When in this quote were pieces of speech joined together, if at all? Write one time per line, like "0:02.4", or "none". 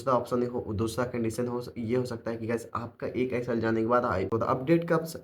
0:04.3